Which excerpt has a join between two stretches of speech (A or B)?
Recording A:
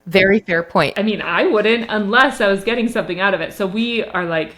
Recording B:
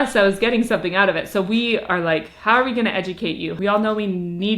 B